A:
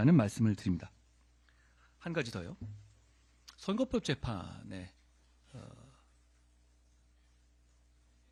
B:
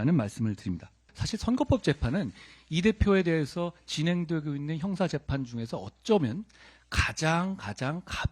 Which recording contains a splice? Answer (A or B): B